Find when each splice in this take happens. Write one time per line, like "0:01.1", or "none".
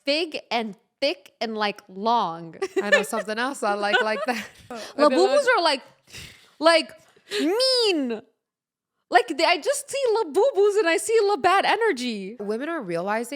0:02.4
0:04.8
0:12.4